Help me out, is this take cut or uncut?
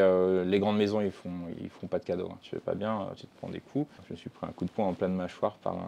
cut